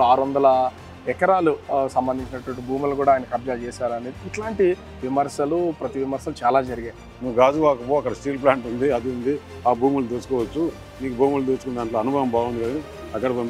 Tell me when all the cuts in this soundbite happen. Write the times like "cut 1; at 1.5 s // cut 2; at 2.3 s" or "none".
cut 1; at 7.0 s